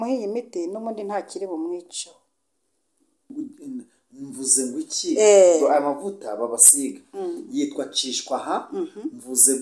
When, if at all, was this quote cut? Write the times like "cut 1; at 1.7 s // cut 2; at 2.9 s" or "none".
cut 1; at 3.3 s